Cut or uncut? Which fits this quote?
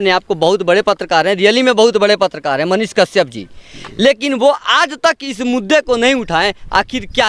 uncut